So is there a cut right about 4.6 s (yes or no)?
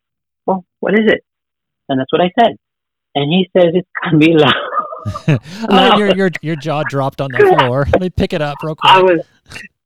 no